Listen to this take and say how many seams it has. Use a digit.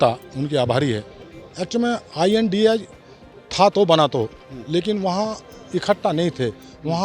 1